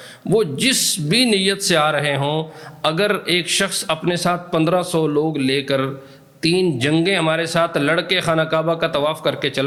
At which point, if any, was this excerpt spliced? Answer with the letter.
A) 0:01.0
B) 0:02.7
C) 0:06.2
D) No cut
D